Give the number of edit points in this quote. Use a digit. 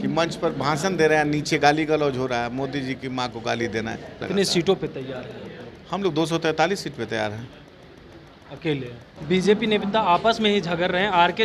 2